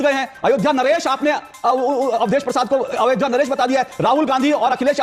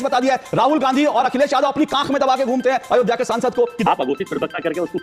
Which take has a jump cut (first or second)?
second